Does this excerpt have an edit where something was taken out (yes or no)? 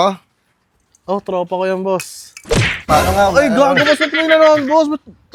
no